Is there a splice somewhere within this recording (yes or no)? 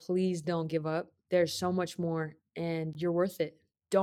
yes